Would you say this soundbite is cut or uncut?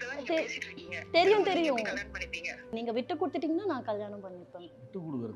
cut